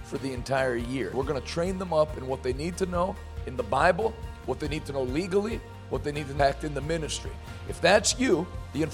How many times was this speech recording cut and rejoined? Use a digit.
1